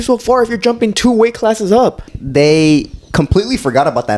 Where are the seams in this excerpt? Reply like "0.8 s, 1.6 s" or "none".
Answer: 2.1 s